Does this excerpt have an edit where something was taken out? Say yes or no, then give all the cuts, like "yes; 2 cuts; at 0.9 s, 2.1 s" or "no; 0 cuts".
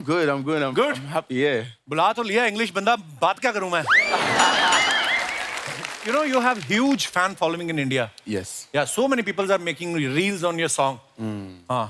yes; 1 cut; at 5.9 s